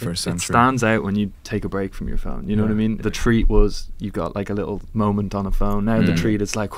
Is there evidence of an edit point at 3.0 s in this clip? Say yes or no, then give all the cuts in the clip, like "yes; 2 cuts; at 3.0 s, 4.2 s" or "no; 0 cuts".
yes; 1 cut; at 3.0 s